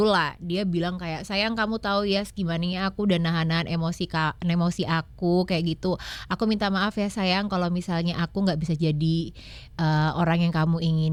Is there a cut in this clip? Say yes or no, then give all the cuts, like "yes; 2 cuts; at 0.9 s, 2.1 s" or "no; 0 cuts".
no; 0 cuts